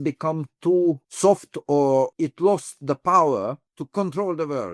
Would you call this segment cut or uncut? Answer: cut